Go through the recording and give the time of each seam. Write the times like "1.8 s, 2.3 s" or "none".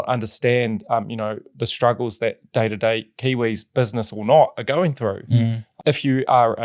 5.6 s